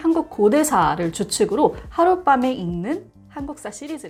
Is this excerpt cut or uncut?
uncut